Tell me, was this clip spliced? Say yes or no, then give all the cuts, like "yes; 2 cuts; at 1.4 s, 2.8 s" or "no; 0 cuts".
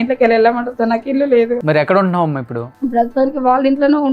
yes; 2 cuts; at 1.6 s, 2.6 s